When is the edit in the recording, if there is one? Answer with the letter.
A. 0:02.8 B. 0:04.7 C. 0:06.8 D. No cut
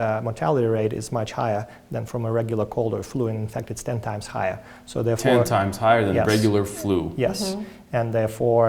D